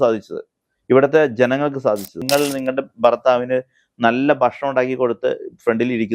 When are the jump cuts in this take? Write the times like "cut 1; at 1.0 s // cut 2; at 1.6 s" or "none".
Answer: cut 1; at 2.2 s